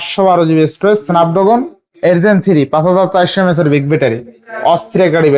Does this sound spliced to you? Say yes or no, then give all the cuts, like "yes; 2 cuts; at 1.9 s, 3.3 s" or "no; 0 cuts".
no; 0 cuts